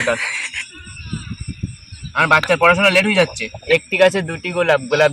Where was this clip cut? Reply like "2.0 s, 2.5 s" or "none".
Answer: 3.5 s